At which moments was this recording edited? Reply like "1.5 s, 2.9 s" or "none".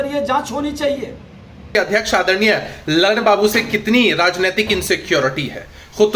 1.7 s